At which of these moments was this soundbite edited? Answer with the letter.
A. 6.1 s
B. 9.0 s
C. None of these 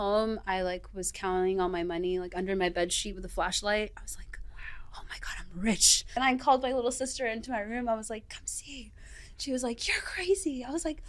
A